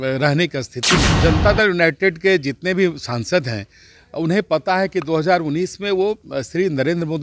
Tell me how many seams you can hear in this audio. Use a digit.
1